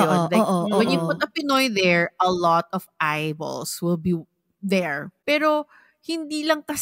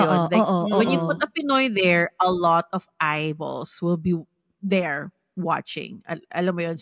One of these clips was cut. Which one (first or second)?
first